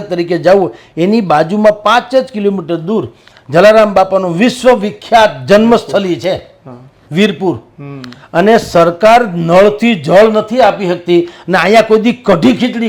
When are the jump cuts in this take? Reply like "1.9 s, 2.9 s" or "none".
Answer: none

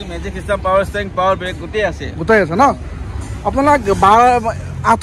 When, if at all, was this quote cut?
none

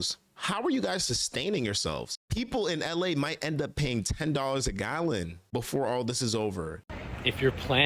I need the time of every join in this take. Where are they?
2.2 s, 6.8 s

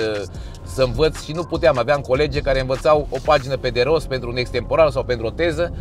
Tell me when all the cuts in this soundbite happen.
none

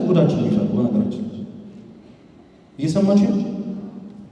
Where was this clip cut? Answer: none

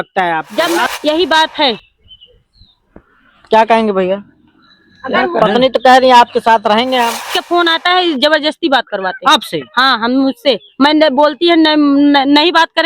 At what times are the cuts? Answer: 0.8 s, 7.3 s

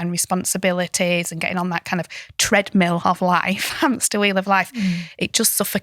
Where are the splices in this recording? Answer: none

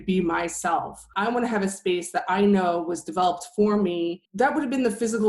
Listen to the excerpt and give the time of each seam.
4.2 s

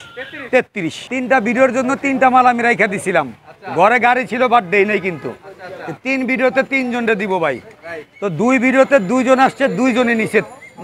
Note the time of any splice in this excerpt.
1.0 s

